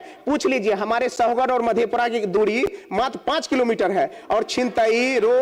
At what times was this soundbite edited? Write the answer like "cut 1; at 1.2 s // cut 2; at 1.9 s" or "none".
none